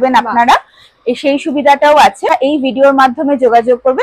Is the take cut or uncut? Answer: cut